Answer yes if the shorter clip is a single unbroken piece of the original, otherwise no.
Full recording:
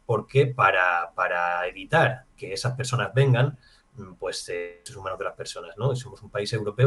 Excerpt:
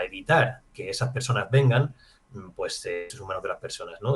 no